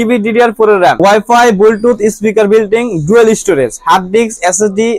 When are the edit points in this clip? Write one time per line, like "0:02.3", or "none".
0:01.0